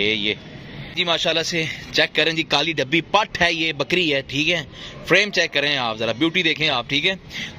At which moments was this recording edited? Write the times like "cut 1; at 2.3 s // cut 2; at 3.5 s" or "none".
cut 1; at 1.0 s